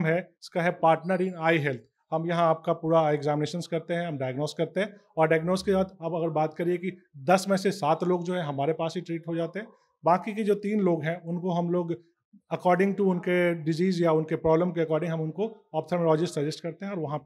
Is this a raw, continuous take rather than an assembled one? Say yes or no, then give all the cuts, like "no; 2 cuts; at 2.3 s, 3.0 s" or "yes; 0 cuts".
yes; 0 cuts